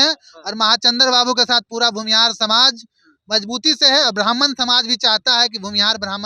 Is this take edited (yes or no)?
no